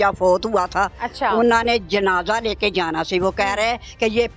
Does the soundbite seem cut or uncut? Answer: cut